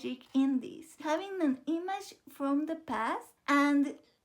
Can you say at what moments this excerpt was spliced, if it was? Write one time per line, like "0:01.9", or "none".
0:01.0